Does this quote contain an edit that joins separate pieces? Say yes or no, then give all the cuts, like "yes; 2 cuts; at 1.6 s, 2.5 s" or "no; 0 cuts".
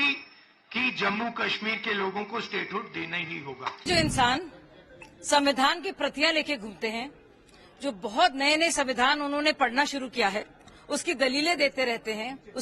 yes; 1 cut; at 3.8 s